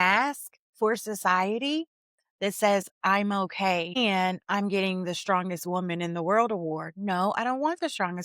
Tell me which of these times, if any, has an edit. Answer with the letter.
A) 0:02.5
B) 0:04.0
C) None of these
B